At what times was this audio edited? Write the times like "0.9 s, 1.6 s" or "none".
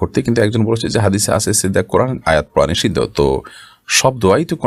none

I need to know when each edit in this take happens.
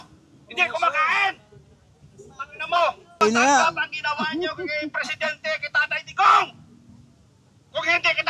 3.2 s

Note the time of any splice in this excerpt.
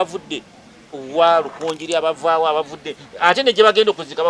none

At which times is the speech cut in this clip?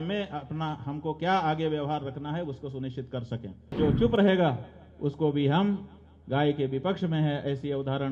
3.7 s

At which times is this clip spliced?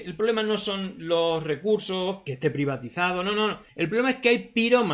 2.3 s, 3.6 s

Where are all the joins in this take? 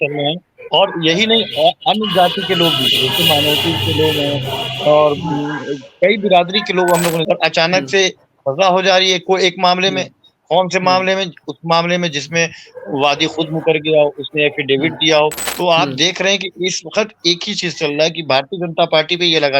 7.2 s, 15.5 s

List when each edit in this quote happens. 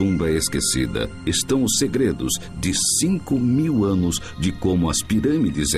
2.8 s

